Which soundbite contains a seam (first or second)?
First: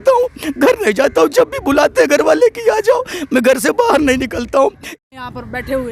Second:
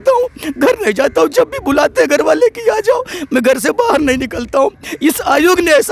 first